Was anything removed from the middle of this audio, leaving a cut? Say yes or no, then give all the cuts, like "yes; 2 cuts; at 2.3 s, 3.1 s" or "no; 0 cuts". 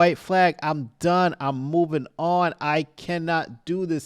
no; 0 cuts